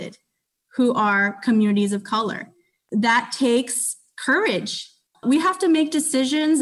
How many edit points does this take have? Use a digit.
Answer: 0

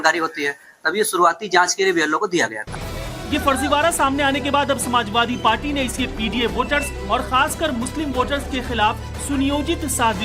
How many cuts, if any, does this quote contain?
1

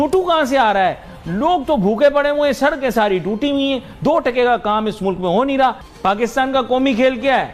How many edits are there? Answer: 1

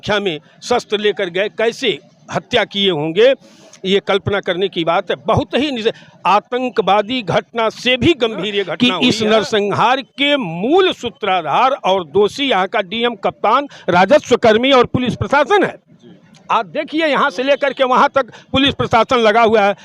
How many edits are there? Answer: 1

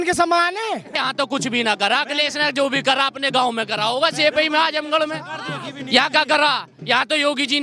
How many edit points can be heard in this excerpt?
1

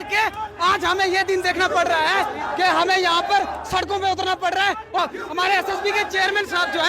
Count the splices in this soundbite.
1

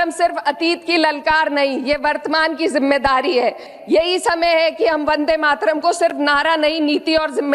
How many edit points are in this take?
1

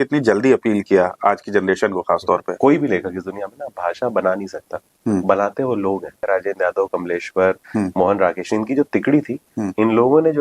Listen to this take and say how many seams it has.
2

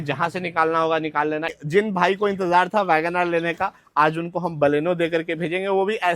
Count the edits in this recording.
1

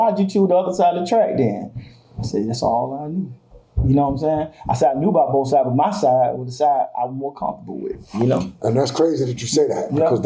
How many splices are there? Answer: 0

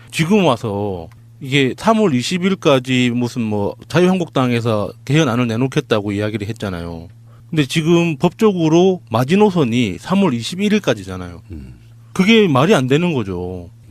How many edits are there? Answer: 1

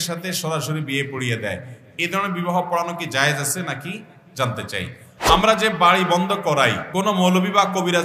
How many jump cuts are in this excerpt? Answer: 2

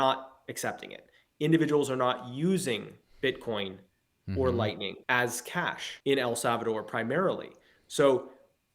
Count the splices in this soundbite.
2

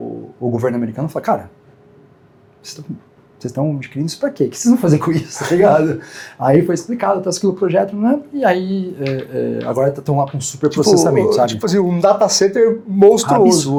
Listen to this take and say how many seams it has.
0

